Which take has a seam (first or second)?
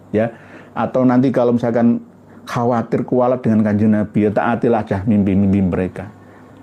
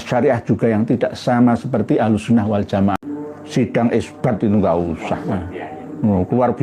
second